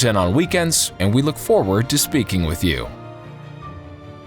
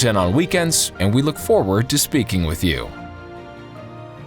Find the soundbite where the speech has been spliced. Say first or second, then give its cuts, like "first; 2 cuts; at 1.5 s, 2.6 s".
first; 1 cut; at 2.9 s